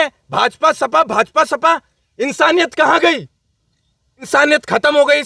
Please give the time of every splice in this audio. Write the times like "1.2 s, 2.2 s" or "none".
4.3 s